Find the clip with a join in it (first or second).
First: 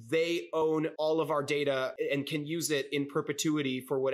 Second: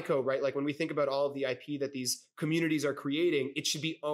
first